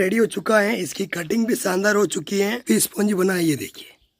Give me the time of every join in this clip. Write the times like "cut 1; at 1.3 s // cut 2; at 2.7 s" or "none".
cut 1; at 2.6 s